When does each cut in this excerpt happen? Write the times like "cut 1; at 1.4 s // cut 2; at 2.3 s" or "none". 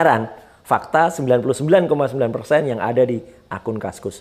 none